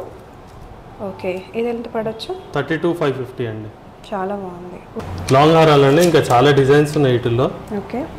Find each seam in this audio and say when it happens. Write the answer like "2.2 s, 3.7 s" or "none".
5.0 s